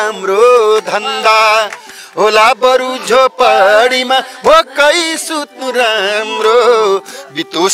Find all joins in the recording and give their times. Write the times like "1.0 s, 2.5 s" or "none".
2.0 s